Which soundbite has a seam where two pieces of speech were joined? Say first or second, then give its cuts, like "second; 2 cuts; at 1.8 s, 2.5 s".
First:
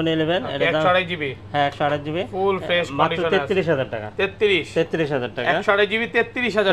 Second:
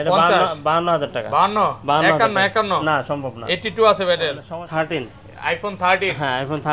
second; 1 cut; at 4.4 s